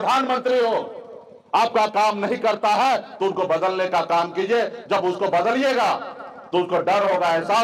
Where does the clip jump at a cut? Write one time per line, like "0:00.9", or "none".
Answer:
none